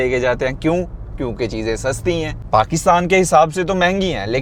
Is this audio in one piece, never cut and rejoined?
yes; 0 cuts

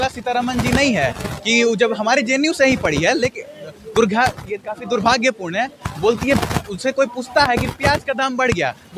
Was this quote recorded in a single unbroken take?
yes; 0 cuts

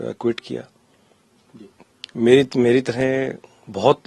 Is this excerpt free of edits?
yes; 0 cuts

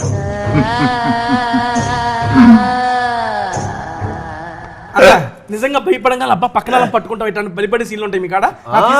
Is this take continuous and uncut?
no; 1 cut; at 4.8 s

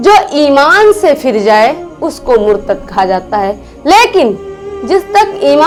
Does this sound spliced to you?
no; 0 cuts

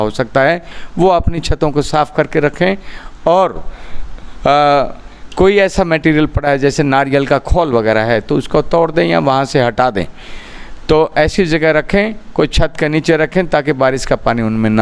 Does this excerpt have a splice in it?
no; 0 cuts

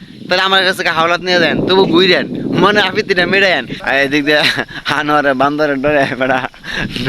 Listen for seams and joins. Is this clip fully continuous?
no; 1 cut; at 3.7 s

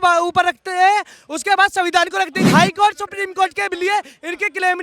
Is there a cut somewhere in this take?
yes; 1 cut; at 2.4 s

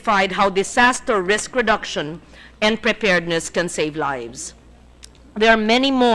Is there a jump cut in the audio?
yes; 1 cut; at 3.4 s

